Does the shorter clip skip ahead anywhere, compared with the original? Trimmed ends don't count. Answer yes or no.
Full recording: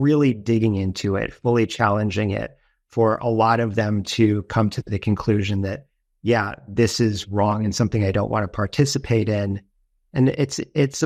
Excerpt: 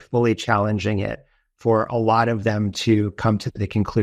no